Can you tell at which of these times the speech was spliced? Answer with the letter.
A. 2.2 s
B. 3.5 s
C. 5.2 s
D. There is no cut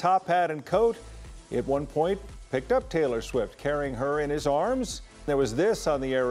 C